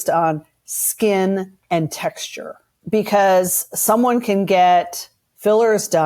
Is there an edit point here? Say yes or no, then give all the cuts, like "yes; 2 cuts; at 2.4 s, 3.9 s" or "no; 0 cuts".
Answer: no; 0 cuts